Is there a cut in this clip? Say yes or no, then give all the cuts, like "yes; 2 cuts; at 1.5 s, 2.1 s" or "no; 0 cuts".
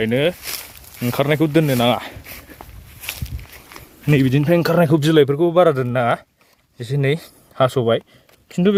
no; 0 cuts